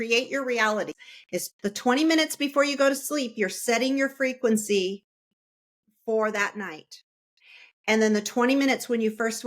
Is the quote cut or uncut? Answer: cut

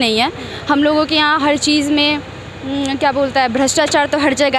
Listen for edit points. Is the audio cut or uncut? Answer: uncut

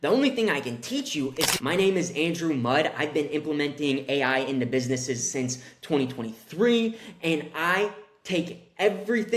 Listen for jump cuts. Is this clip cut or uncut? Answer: cut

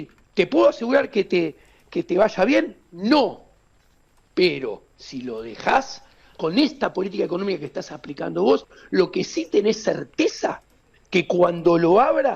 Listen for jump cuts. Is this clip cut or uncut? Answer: uncut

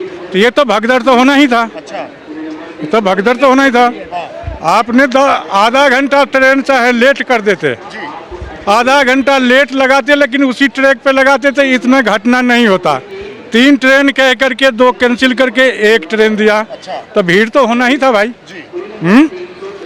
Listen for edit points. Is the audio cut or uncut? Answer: uncut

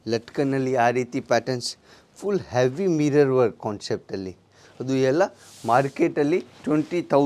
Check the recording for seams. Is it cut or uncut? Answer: uncut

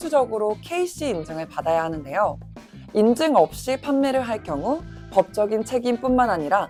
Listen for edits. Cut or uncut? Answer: uncut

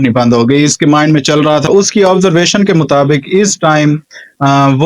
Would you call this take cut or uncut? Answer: cut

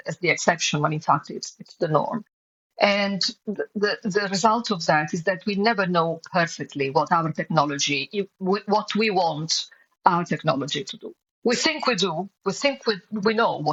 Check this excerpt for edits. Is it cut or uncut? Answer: uncut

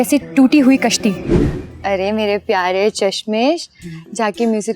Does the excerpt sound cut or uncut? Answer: cut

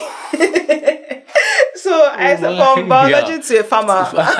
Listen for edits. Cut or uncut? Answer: uncut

